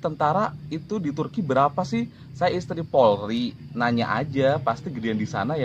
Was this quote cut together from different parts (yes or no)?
no